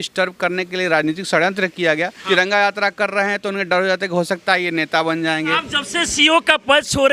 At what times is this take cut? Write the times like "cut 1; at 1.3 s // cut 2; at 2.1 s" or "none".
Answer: cut 1; at 2.2 s // cut 2; at 5.6 s